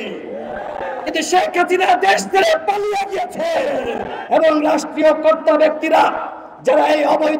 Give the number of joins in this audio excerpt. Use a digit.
1